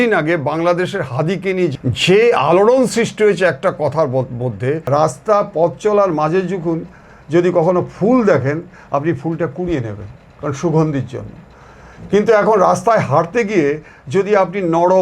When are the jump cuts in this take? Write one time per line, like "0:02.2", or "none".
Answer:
0:01.7
0:04.8